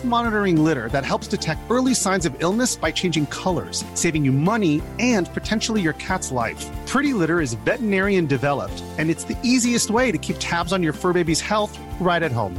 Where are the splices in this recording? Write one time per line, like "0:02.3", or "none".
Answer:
none

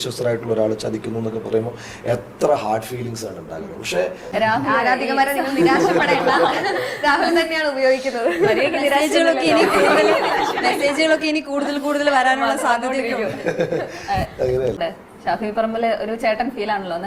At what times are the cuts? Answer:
0:04.3
0:14.8

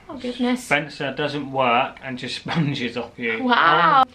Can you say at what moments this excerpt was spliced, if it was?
none

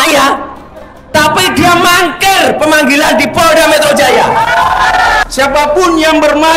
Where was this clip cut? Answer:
0:05.2

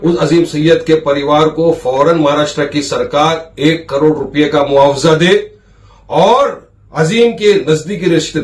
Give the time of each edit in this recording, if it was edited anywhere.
none

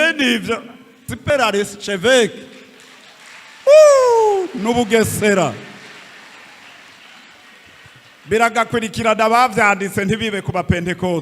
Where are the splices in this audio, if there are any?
0:01.1

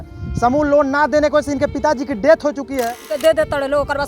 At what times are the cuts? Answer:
0:03.0

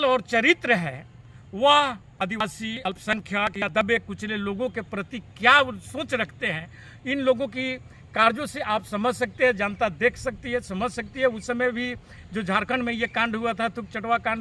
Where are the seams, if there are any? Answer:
none

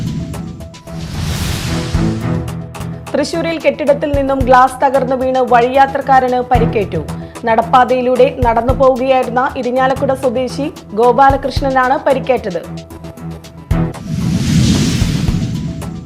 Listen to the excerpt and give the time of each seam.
none

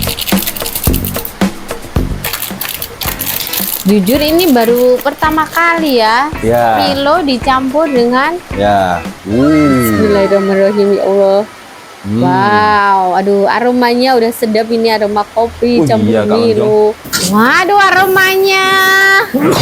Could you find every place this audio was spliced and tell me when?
0:09.1
0:17.1

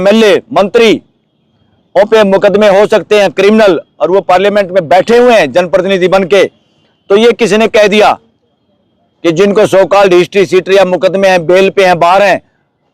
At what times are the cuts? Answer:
none

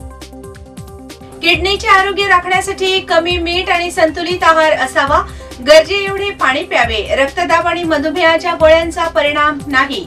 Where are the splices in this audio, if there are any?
0:01.2

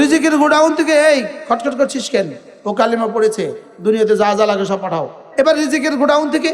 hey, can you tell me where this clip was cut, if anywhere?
0:05.2

